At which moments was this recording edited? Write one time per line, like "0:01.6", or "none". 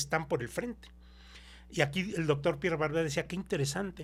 none